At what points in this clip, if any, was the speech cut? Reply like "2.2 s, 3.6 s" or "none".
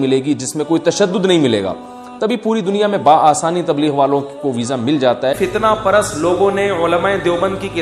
5.4 s